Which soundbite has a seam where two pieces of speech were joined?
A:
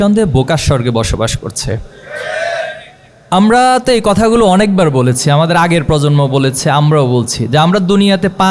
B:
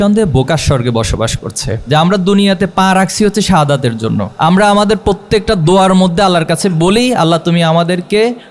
B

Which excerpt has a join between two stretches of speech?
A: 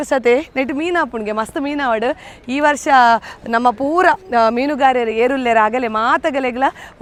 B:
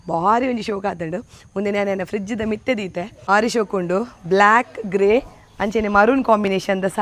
B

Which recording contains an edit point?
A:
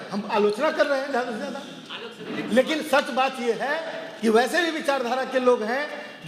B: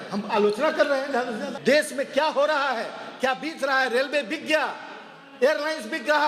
B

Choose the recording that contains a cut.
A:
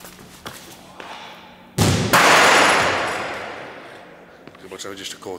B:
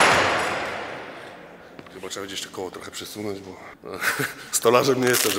B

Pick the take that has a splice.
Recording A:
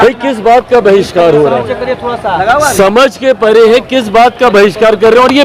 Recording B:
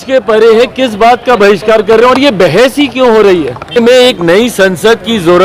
B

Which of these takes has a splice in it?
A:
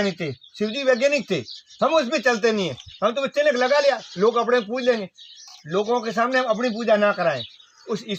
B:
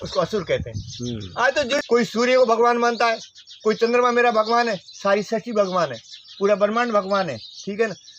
B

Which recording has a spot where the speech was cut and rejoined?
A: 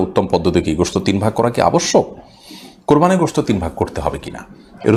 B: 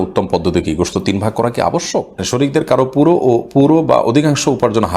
B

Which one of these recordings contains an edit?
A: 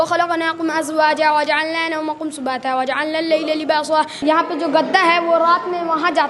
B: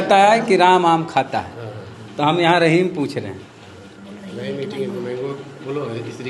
A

